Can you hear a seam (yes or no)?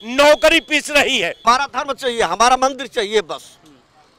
yes